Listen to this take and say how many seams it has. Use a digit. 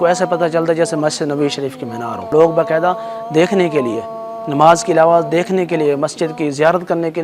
1